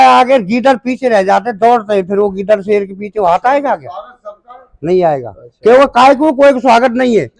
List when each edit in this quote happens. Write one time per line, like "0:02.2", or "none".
none